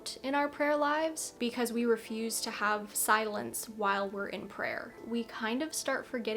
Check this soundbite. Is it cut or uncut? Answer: cut